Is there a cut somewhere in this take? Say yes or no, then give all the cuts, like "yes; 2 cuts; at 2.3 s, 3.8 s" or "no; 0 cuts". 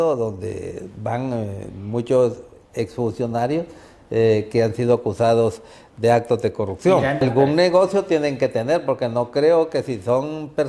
yes; 1 cut; at 7.2 s